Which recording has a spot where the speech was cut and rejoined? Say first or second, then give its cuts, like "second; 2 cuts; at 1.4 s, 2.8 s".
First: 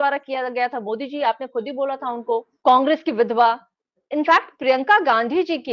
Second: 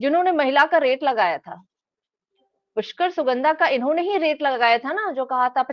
first; 1 cut; at 2.5 s